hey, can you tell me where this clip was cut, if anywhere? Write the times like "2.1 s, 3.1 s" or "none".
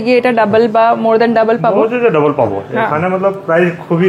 none

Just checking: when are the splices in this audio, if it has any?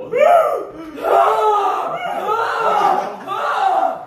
none

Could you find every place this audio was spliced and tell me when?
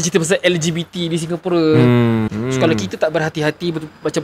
2.3 s

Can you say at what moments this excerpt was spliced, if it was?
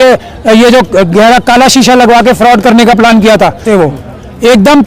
3.7 s

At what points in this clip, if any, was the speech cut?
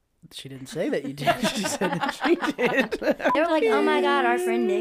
3.3 s

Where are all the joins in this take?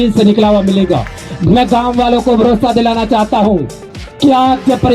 1.3 s

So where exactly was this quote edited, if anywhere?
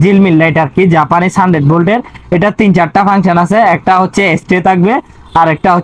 none

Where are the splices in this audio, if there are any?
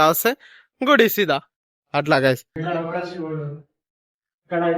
2.6 s

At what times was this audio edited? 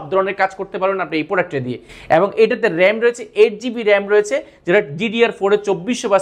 none

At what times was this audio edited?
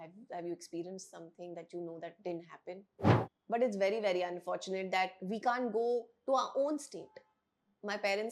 3.3 s

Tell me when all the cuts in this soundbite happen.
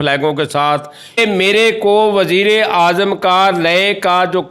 1.2 s

